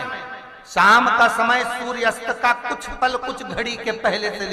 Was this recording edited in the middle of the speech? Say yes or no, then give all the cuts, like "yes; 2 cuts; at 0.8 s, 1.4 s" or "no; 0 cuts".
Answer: no; 0 cuts